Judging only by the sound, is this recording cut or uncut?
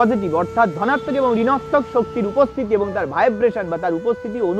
uncut